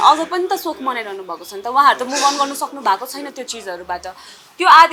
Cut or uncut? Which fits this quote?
uncut